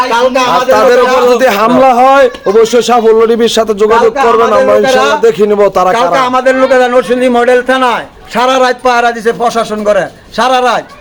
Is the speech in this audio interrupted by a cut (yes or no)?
no